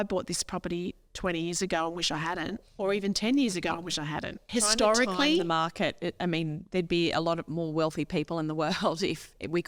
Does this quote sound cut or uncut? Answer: cut